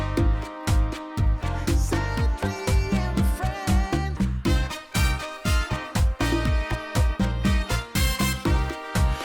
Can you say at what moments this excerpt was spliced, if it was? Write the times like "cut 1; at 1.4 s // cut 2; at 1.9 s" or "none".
cut 1; at 4.1 s